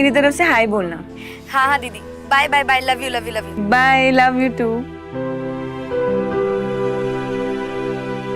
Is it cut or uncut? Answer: uncut